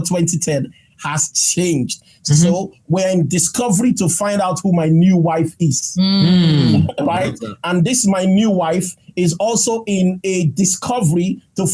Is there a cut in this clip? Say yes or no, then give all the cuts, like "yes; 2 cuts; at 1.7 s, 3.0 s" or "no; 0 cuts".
no; 0 cuts